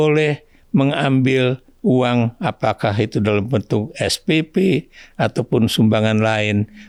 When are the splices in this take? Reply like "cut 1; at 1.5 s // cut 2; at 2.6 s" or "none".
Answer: none